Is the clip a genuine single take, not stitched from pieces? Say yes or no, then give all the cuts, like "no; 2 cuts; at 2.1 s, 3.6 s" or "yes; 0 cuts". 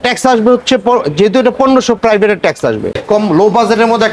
no; 1 cut; at 3.0 s